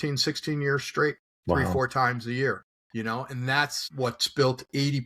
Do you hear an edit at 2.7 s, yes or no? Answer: yes